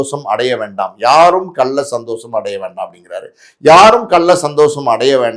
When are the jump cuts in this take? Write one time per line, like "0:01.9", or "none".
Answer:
none